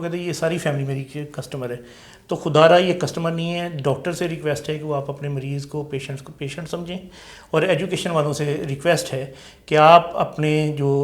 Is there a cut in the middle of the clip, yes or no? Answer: no